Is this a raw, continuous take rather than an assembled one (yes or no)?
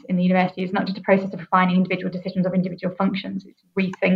yes